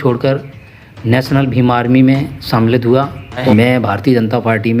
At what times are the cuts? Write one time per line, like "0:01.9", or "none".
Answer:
0:03.4